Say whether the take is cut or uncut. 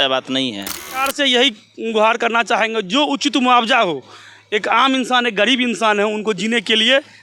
cut